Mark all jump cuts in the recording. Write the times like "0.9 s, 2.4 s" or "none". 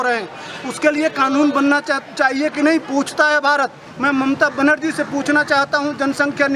3.9 s